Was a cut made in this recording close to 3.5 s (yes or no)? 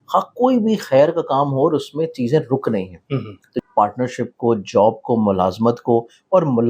yes